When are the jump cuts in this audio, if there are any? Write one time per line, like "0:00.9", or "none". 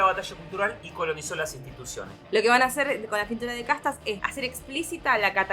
0:02.1
0:04.2